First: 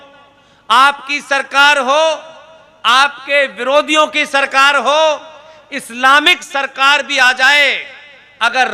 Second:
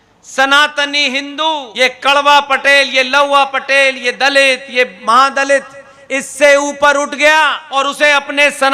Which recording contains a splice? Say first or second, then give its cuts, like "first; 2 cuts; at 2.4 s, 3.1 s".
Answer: second; 2 cuts; at 1.7 s, 7.7 s